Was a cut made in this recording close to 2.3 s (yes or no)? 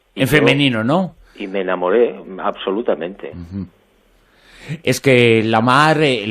yes